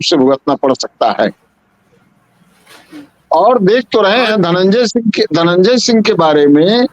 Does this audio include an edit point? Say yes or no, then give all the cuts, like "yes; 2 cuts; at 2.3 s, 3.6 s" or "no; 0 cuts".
no; 0 cuts